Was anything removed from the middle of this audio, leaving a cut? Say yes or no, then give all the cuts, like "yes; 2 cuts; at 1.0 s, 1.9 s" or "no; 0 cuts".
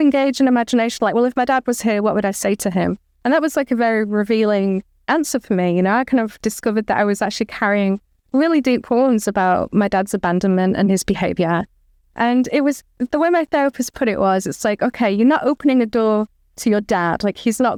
no; 0 cuts